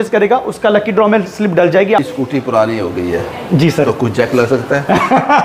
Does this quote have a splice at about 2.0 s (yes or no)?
yes